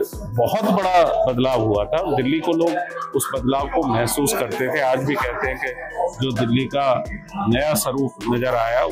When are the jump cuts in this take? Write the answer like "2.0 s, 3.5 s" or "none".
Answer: none